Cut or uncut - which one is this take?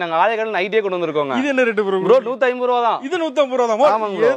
uncut